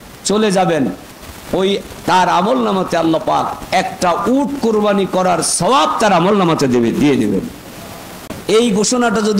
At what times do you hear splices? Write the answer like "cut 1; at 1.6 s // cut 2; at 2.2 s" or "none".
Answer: cut 1; at 8.3 s